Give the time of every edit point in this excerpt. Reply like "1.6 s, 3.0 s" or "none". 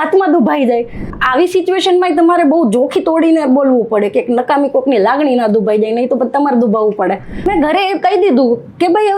1.1 s, 7.5 s